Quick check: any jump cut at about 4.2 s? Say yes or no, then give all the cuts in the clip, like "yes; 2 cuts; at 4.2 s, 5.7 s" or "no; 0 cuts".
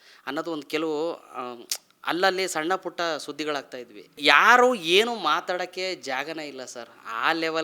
yes; 1 cut; at 4.2 s